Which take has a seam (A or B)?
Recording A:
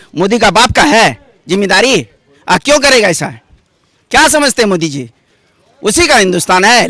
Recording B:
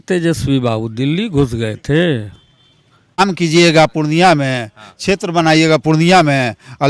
B